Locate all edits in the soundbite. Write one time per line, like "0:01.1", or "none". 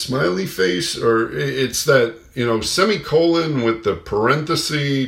none